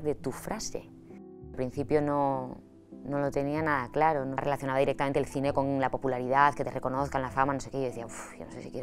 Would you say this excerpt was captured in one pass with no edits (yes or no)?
no